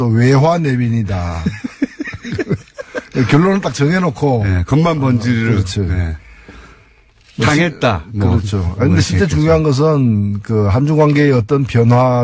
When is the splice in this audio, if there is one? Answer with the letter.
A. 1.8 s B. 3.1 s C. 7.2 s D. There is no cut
D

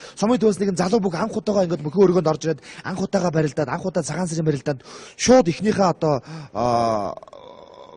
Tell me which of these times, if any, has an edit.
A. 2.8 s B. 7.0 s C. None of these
C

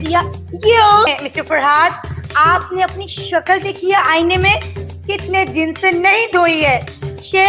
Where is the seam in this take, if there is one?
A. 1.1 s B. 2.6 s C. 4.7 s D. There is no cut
A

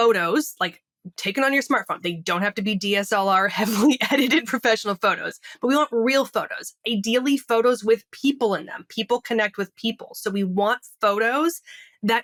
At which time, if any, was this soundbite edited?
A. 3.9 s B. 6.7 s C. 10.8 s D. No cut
D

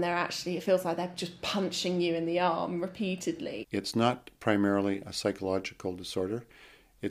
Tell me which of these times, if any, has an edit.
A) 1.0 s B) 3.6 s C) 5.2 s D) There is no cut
B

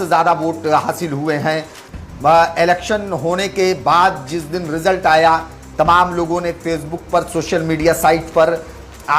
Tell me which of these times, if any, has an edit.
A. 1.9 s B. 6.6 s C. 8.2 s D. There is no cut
A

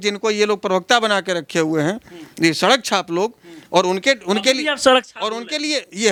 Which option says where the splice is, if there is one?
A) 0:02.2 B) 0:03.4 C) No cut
C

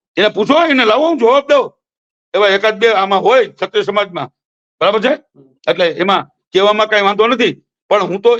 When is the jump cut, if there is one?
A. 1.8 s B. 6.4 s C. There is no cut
C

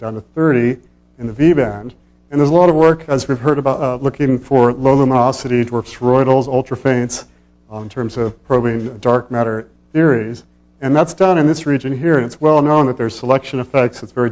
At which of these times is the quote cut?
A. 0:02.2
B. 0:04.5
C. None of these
C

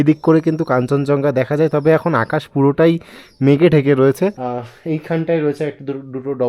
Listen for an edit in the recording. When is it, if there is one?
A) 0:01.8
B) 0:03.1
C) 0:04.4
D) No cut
C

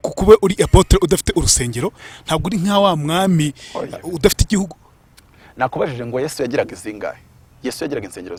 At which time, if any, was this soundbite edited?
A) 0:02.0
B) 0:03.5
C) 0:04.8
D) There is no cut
D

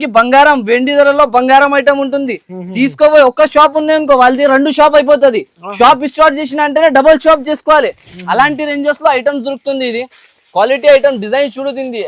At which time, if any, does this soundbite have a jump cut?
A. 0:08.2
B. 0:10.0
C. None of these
C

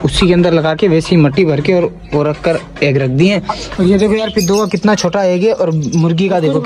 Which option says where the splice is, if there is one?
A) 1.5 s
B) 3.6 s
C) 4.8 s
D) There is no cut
B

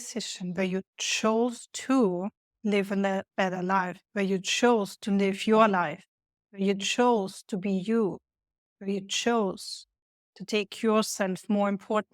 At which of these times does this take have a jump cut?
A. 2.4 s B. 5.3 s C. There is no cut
A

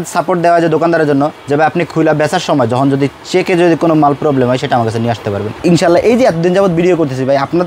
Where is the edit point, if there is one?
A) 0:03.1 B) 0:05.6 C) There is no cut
B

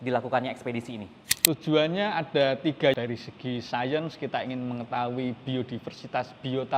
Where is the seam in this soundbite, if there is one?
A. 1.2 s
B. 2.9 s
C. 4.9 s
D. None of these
B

